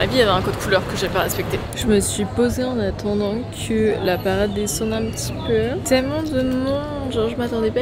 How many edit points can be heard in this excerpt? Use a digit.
0